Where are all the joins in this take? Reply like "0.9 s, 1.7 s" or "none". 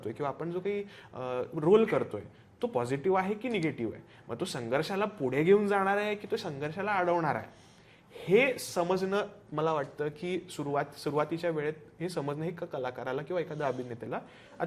none